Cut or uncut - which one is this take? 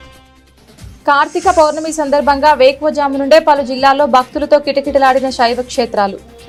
uncut